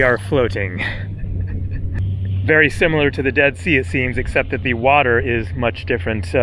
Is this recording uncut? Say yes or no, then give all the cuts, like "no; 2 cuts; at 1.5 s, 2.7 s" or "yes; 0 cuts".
no; 1 cut; at 2.0 s